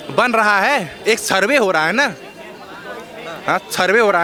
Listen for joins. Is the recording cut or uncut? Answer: uncut